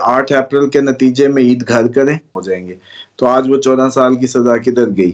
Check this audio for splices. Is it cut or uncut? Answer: cut